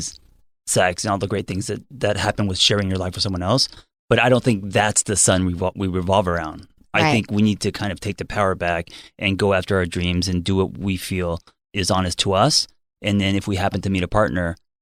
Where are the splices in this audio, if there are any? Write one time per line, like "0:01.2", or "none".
none